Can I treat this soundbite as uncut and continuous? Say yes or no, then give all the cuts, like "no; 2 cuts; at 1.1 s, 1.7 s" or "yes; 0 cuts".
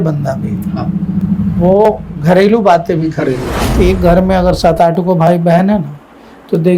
no; 1 cut; at 3.8 s